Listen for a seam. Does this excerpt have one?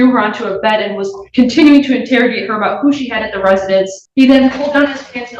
yes; 1 cut; at 4.0 s

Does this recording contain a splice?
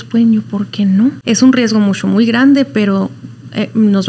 yes; 1 cut; at 1.2 s

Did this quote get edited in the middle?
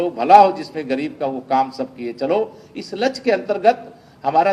no; 0 cuts

